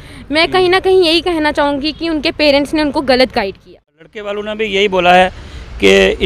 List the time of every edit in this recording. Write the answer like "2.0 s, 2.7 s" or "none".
4.3 s